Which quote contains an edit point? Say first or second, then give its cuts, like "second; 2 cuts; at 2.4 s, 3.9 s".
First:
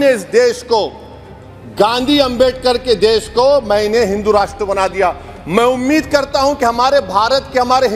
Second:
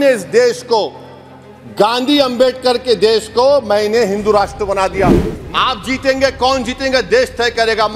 second; 1 cut; at 5.3 s